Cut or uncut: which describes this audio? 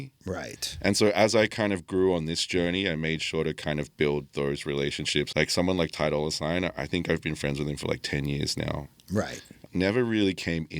cut